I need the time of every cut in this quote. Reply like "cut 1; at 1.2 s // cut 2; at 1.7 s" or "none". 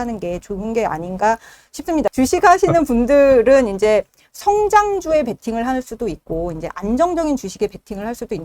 cut 1; at 2.1 s